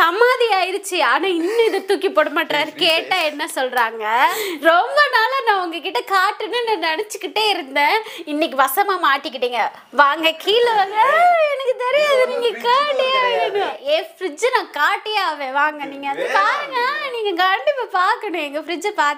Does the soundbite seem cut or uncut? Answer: cut